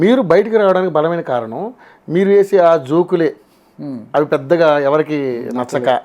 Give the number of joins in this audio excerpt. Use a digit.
0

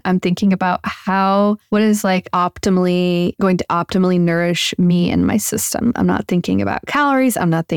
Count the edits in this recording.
2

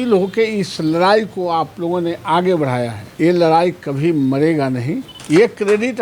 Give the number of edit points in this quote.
2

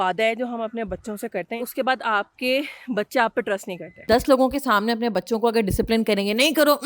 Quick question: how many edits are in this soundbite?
2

